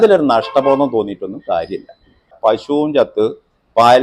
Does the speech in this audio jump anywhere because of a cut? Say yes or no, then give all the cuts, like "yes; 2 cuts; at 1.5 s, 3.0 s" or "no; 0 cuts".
yes; 1 cut; at 2.3 s